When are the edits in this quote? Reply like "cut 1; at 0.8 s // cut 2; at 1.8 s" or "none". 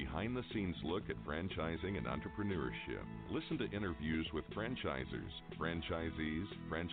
none